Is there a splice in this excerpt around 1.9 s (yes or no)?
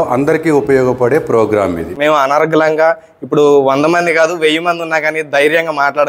yes